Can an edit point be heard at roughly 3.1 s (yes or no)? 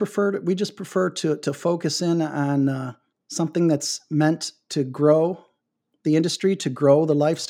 no